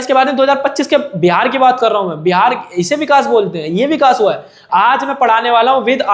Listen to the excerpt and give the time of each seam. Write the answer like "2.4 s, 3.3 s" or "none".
4.6 s